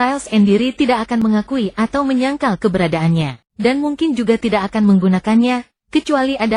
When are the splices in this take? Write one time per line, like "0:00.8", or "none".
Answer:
0:03.4